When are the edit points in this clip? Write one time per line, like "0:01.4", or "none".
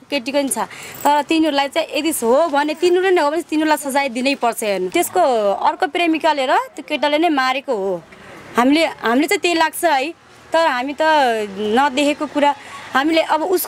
0:04.9

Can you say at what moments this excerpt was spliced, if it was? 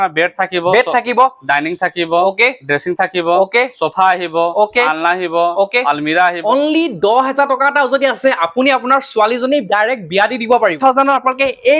0:06.4
0:10.7

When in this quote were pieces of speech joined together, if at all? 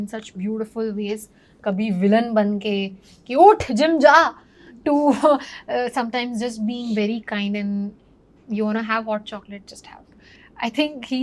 none

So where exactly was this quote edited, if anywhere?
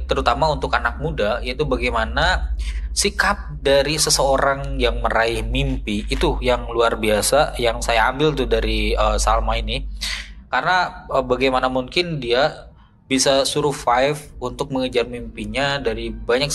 none

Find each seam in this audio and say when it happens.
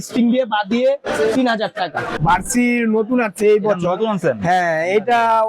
0:02.2

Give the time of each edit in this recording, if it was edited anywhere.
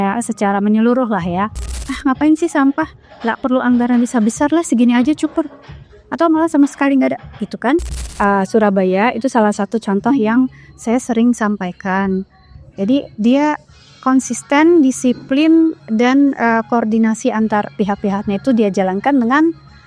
0:01.9
0:08.0

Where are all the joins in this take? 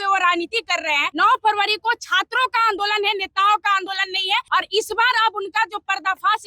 0:01.1
0:04.5

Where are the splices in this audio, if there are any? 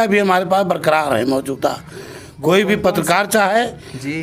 none

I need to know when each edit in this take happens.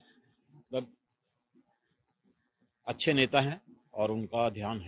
none

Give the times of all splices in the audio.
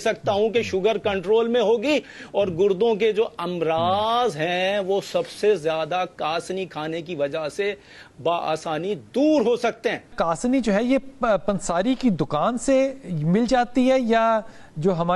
0:10.1

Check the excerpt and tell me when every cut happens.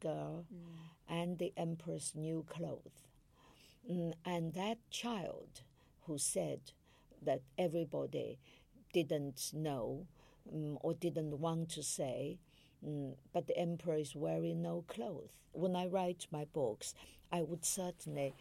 0:15.5

